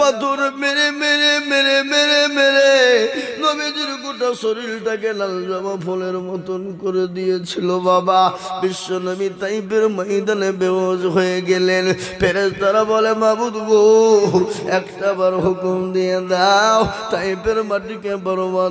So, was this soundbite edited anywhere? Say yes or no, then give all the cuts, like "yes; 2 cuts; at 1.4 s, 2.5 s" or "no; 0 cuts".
no; 0 cuts